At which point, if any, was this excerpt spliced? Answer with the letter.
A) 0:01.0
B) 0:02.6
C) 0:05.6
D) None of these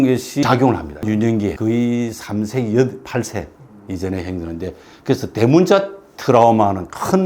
A